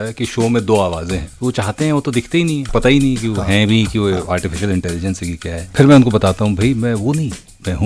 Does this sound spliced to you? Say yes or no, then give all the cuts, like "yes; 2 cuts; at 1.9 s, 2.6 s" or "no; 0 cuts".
yes; 3 cuts; at 1.3 s, 2.6 s, 5.7 s